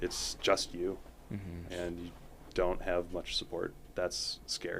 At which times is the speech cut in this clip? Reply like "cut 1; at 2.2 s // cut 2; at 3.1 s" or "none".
cut 1; at 1.6 s